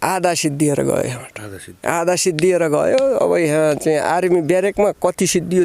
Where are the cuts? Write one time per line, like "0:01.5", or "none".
none